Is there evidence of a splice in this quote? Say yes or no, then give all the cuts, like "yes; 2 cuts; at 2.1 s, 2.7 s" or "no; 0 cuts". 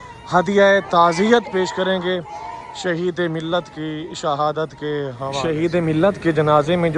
yes; 1 cut; at 5.4 s